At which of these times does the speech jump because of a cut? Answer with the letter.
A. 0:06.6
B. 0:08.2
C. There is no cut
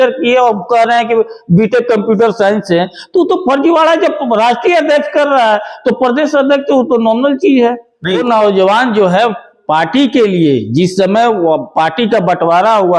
B